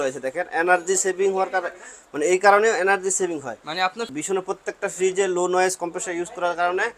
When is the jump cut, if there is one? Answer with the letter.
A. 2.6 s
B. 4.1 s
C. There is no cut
B